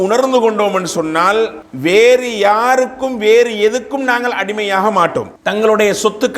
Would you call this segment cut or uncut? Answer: cut